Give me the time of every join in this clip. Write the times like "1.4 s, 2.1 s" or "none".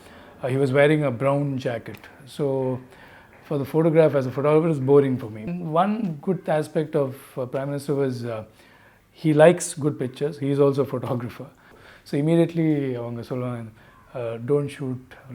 5.5 s, 11.8 s